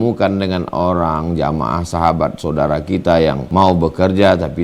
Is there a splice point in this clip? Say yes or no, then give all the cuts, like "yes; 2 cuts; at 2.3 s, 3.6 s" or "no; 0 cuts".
yes; 1 cut; at 3.4 s